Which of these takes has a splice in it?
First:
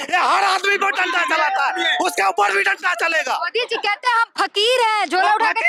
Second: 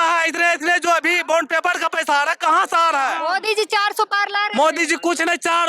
second; 1 cut; at 3.2 s

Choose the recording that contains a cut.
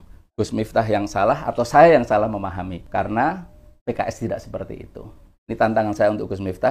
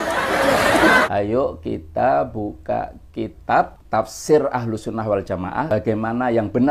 second; 1 cut; at 1.1 s

